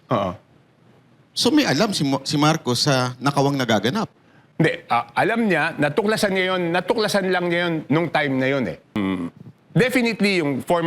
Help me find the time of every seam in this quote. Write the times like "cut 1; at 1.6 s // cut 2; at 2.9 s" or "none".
cut 1; at 8.9 s